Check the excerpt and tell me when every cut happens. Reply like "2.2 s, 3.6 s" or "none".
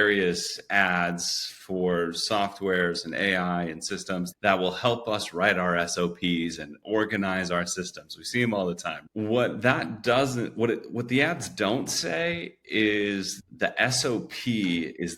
4.3 s, 13.4 s